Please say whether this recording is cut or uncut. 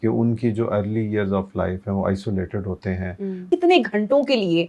cut